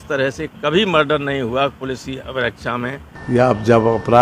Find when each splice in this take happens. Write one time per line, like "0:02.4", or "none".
0:03.1